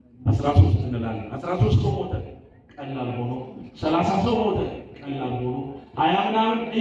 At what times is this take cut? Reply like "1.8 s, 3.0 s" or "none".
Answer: none